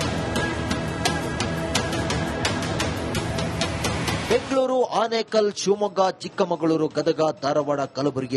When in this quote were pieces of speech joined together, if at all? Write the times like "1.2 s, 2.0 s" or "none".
4.2 s